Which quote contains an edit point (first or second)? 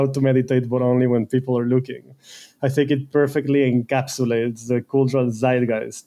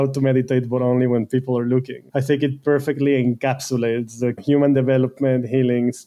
second